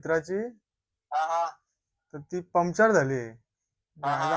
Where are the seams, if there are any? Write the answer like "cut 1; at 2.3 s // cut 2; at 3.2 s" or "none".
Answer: none